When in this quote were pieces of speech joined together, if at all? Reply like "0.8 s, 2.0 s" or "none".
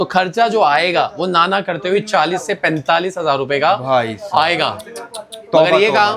none